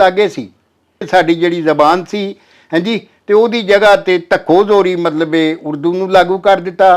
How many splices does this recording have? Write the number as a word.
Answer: one